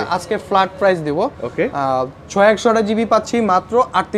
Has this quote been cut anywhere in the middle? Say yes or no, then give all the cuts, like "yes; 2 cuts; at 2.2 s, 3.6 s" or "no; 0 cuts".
no; 0 cuts